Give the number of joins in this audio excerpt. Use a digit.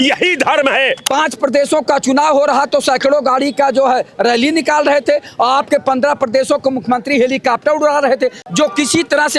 2